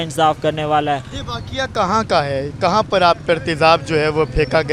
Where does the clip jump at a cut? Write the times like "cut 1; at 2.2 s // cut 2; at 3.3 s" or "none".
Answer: none